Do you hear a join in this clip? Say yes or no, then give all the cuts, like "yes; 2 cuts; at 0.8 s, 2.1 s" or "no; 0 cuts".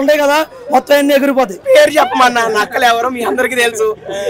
yes; 1 cut; at 1.6 s